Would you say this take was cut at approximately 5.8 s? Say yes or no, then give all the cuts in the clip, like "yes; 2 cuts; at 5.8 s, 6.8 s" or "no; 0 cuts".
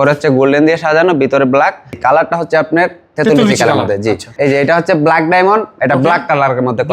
no; 2 cuts; at 2.0 s, 4.3 s